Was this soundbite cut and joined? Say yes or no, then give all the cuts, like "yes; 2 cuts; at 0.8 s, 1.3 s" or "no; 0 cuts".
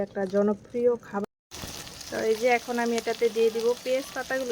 yes; 1 cut; at 1.2 s